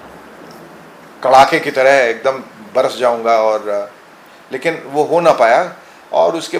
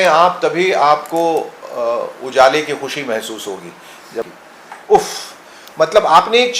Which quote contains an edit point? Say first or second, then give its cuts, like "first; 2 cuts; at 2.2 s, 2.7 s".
second; 1 cut; at 4.3 s